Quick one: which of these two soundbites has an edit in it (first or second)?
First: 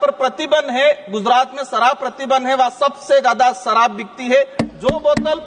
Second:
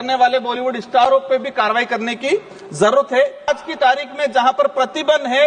second